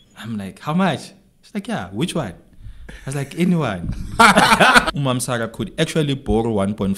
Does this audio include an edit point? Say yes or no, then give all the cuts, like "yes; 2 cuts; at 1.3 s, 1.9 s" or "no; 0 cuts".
yes; 1 cut; at 4.9 s